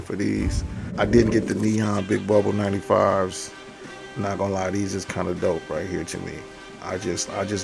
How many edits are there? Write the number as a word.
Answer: one